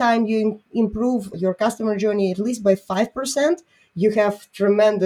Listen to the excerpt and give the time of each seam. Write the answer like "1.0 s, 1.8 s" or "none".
1.3 s